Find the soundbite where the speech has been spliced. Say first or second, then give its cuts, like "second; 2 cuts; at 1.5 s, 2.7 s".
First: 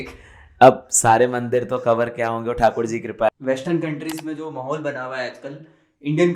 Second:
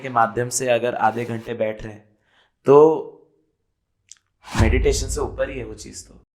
first; 1 cut; at 3.3 s